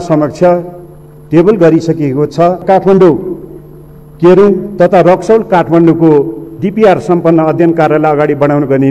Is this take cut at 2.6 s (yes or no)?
yes